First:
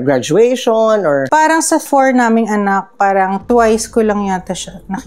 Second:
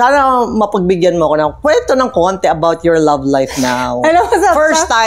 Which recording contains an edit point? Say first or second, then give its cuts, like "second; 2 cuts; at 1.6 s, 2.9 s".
first; 1 cut; at 1.2 s